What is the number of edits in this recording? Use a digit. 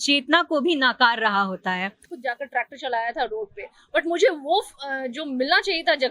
1